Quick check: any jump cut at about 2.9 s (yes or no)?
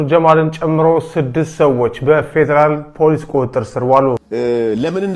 no